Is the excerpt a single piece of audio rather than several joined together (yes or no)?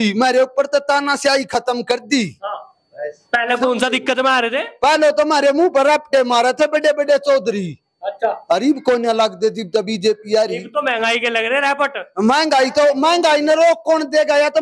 yes